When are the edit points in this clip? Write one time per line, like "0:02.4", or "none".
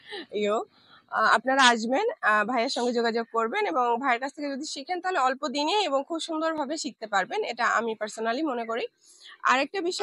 none